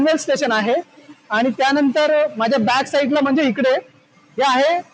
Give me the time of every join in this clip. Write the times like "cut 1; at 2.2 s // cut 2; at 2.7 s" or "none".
none